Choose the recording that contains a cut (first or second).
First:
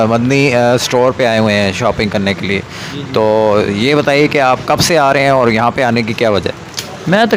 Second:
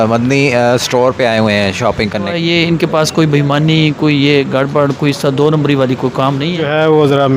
second